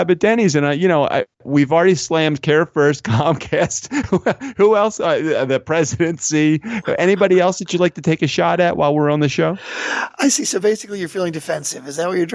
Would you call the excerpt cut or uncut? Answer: uncut